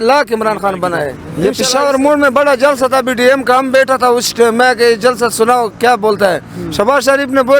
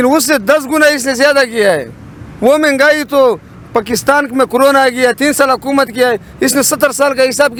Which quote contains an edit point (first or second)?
first